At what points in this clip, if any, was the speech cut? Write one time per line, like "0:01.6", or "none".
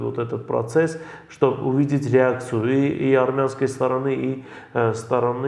none